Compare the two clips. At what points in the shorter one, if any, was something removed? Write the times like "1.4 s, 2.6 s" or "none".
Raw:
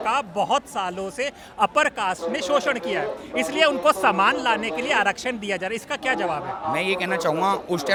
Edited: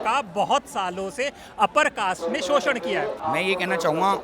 3.2 s